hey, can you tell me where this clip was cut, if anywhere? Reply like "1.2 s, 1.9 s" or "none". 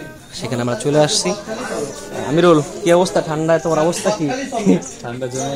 none